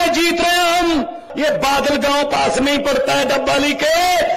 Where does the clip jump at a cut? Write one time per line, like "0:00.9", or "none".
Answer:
0:01.3